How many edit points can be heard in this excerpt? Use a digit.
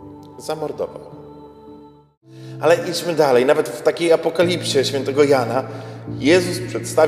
1